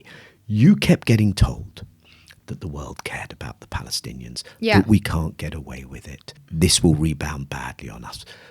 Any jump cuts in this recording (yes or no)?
yes